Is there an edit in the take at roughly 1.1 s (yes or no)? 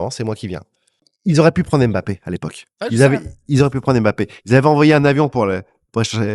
yes